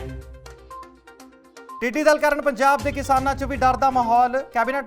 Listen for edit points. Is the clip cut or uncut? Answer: cut